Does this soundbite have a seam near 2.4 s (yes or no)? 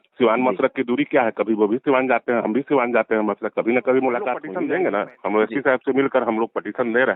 no